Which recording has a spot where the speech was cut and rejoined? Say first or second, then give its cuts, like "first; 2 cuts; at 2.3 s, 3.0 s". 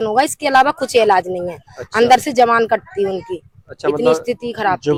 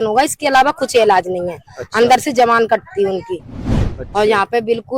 second; 1 cut; at 3.7 s